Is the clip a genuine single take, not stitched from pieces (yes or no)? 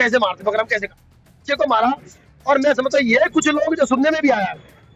yes